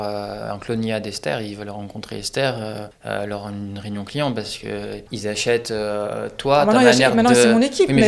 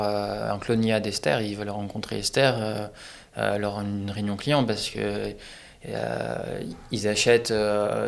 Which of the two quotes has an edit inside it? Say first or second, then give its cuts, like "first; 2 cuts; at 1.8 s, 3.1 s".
first; 2 cuts; at 2.9 s, 5.1 s